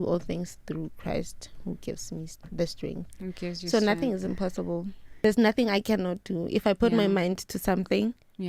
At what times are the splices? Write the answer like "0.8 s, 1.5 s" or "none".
5.2 s

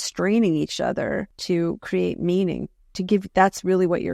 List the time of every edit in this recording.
1.3 s

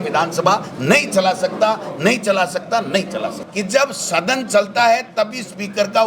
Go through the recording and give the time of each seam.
3.4 s

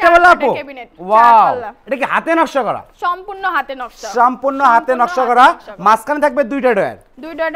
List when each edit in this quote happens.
2.9 s

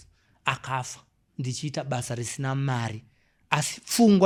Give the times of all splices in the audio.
none

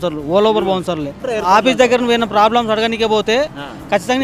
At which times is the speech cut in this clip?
1.2 s

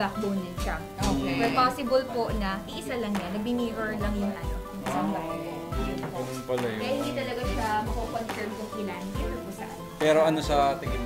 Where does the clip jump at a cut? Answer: none

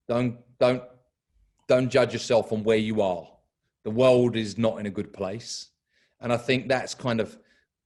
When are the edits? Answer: none

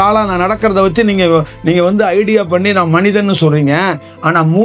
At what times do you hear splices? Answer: none

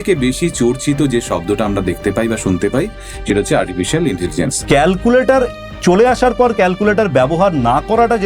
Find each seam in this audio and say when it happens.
4.6 s

